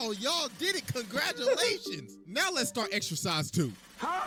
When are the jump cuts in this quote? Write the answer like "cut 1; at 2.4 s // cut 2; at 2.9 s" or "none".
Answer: none